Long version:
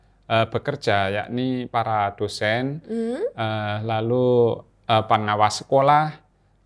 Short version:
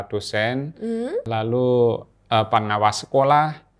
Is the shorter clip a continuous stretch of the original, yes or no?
no